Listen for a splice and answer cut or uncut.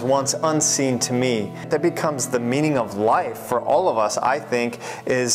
cut